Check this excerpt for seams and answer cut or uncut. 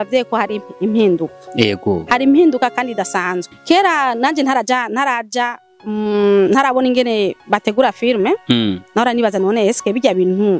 cut